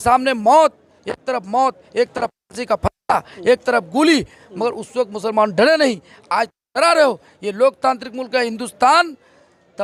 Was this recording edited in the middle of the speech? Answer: no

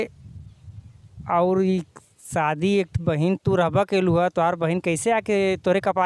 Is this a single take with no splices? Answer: yes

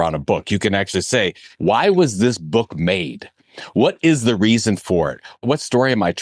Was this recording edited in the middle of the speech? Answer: yes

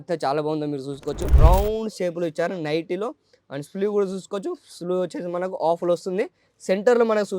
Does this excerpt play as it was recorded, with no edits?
no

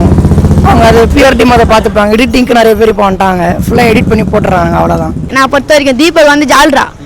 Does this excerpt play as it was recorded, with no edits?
no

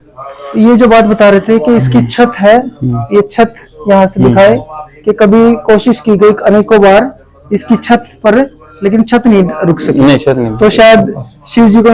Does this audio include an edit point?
no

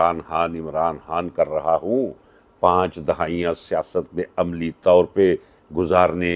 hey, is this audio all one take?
yes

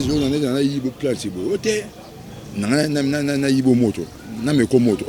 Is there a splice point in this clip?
no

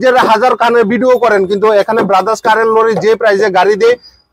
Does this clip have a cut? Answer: no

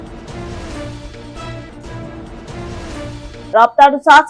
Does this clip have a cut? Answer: yes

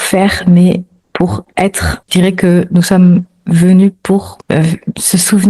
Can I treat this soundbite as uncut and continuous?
no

